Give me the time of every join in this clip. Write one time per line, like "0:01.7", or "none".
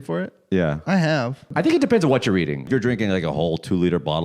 0:01.5
0:02.6